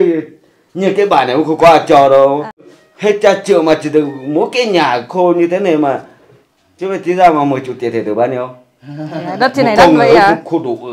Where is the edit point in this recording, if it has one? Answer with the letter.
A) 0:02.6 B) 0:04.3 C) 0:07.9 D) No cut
A